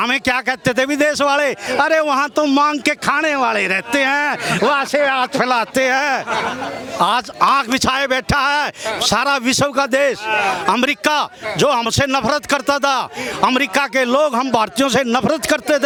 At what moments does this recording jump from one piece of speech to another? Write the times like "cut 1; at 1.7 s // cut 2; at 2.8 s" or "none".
none